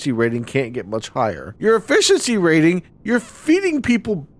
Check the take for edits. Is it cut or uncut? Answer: cut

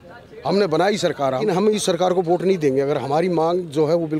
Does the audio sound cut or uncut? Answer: cut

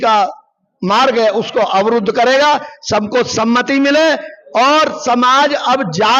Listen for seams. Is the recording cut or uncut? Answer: uncut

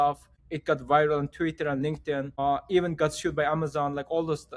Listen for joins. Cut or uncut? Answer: uncut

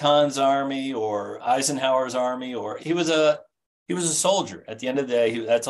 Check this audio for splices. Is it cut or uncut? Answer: cut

